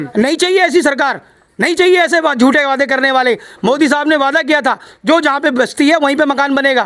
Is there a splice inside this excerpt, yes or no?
no